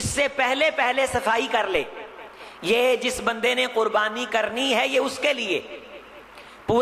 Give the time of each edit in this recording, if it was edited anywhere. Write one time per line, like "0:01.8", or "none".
none